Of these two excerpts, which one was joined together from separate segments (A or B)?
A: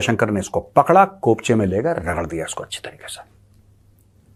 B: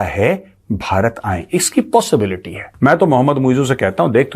B